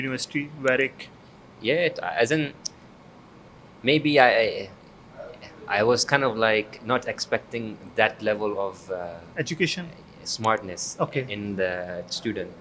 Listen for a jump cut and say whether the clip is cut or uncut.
uncut